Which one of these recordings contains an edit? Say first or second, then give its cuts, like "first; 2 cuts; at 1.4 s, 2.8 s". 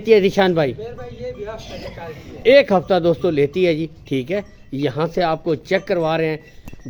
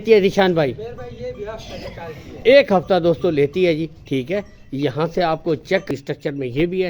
second; 1 cut; at 5.9 s